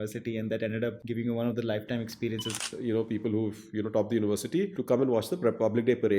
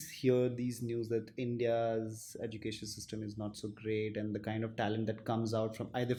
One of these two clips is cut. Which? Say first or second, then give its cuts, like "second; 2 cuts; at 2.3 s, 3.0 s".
first; 3 cuts; at 1.0 s, 2.6 s, 4.8 s